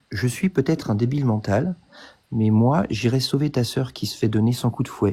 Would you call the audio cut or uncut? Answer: uncut